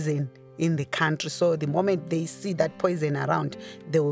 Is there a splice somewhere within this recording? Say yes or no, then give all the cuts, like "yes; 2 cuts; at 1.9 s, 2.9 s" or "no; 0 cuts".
yes; 1 cut; at 1.6 s